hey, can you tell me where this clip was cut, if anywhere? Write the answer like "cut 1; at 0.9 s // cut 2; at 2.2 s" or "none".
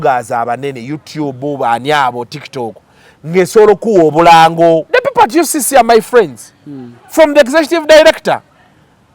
cut 1; at 4.9 s